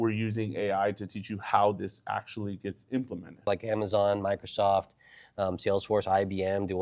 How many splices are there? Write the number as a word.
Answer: one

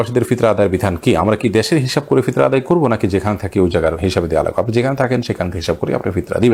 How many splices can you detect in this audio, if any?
zero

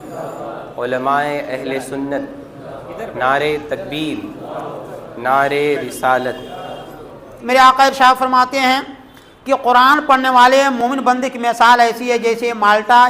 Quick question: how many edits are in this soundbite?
one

